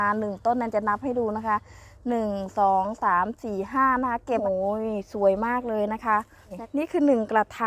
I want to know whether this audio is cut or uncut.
cut